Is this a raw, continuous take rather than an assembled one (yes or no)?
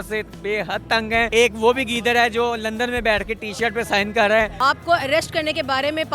no